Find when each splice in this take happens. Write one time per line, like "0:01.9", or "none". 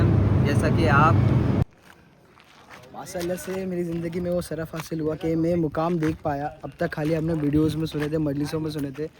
0:01.6